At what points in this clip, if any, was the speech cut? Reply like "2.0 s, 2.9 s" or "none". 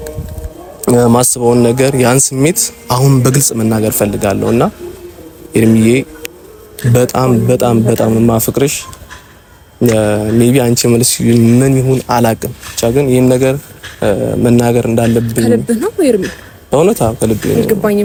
none